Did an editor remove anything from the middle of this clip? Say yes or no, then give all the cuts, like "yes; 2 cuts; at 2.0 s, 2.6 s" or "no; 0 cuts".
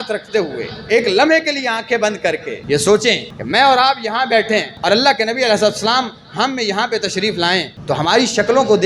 yes; 4 cuts; at 2.5 s, 3.3 s, 4.7 s, 7.7 s